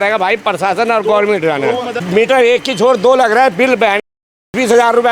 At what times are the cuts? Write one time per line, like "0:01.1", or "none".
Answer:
0:02.0